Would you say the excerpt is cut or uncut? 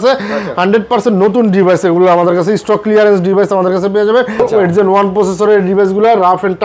cut